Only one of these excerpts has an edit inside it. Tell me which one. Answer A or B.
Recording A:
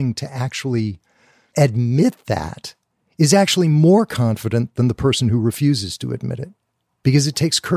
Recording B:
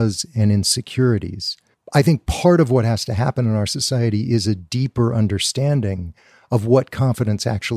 B